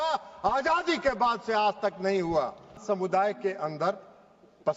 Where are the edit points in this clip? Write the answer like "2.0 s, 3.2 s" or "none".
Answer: 2.8 s